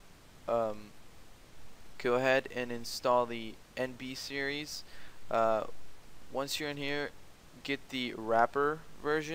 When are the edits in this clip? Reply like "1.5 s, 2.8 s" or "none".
none